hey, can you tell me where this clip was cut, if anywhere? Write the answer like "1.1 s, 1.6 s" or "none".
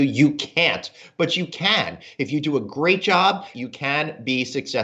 3.5 s

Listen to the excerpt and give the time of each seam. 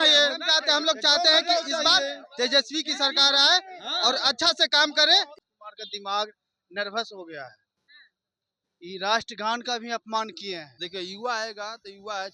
5.3 s, 10.7 s

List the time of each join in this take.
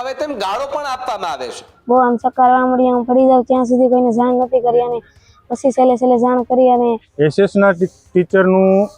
1.7 s, 7.1 s

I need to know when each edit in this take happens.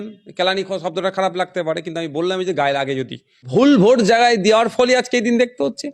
3.5 s

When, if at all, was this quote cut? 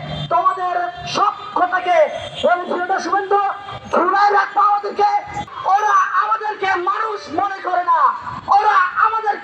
5.4 s

